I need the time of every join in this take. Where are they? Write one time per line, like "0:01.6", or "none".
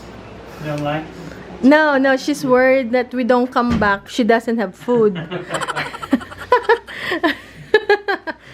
0:04.0